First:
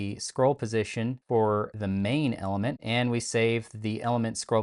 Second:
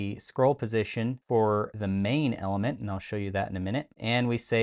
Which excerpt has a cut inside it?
first; 1 cut; at 2.8 s

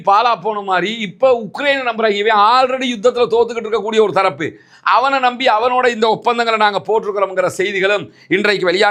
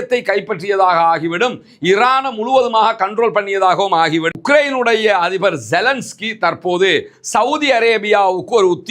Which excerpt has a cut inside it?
second; 1 cut; at 4.4 s

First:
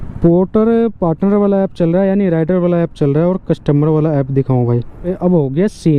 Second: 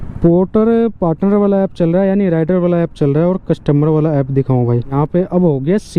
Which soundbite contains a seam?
first; 1 cut; at 4.9 s

